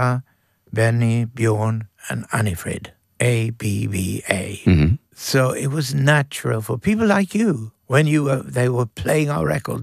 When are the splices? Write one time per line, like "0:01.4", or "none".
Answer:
0:03.0
0:05.1
0:07.7